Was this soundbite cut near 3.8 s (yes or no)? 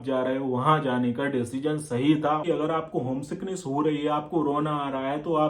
no